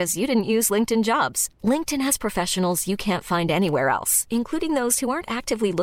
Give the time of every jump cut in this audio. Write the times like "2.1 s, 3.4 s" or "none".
none